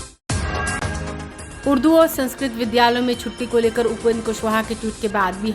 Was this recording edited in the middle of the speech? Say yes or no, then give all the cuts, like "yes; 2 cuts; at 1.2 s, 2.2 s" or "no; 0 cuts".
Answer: yes; 1 cut; at 0.9 s